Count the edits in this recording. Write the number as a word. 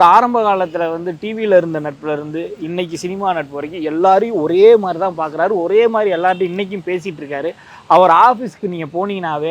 zero